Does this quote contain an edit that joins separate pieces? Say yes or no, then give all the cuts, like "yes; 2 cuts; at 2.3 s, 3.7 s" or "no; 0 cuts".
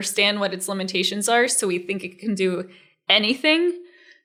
no; 0 cuts